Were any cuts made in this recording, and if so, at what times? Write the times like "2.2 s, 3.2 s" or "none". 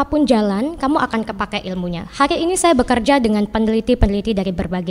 none